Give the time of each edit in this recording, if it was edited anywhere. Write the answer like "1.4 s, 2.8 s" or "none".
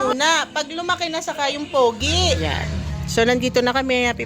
2.4 s